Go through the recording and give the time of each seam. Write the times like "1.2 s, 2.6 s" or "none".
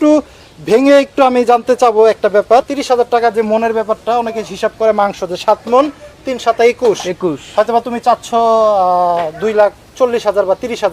2.8 s